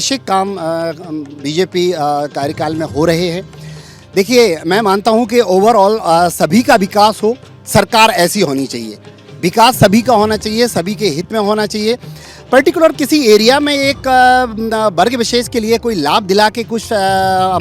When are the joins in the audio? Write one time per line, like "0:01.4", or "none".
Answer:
none

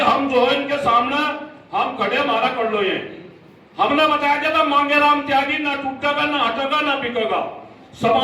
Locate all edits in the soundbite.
none

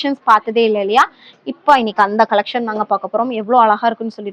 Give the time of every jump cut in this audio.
none

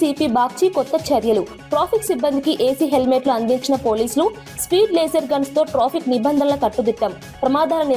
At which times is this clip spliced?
none

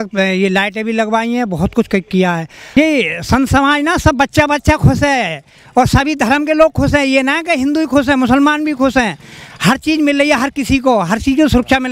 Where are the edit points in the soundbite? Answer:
0:02.8

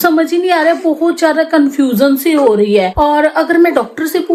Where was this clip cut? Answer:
none

